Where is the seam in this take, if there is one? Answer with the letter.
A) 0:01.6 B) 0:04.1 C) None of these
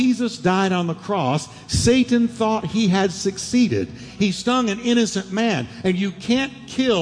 B